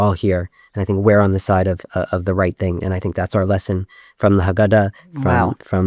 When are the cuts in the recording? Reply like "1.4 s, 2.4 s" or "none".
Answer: none